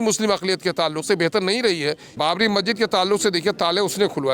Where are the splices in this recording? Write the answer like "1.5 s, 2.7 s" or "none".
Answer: 2.1 s